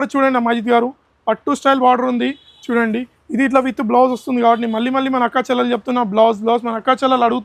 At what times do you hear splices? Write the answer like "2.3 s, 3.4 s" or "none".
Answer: none